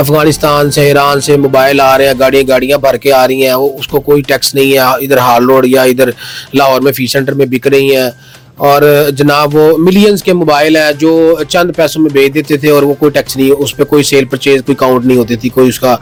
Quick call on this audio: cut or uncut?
uncut